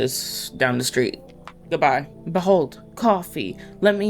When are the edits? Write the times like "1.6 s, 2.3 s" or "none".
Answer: 1.6 s, 2.2 s